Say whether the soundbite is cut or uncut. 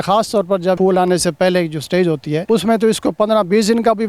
cut